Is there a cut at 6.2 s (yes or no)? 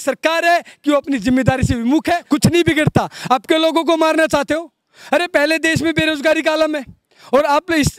no